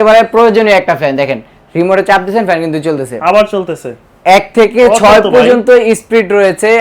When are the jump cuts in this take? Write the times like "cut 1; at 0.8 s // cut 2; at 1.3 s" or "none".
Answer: none